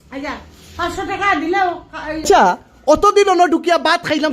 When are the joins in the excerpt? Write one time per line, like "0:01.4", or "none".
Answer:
0:02.2